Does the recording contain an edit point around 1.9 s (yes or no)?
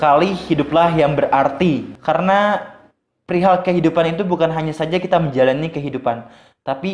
yes